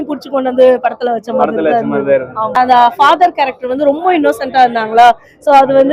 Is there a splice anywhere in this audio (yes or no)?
yes